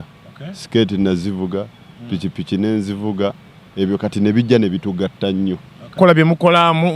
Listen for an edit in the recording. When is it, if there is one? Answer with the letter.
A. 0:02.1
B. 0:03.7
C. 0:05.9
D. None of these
C